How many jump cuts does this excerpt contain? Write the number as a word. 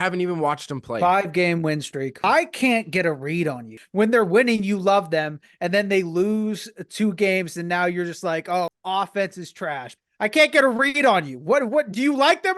four